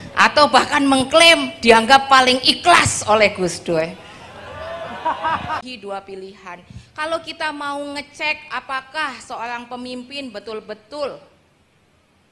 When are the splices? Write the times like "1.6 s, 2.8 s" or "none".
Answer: 5.7 s